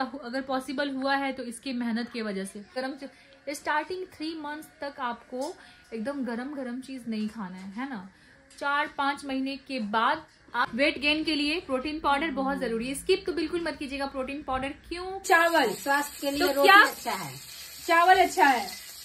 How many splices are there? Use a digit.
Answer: 3